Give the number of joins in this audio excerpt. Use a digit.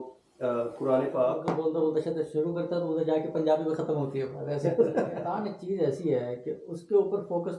2